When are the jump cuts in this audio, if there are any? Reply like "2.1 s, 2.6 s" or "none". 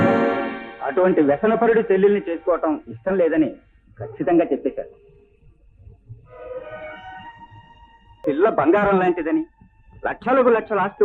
8.2 s